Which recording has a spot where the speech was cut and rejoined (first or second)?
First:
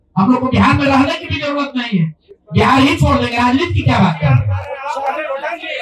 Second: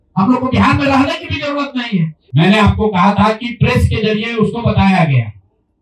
second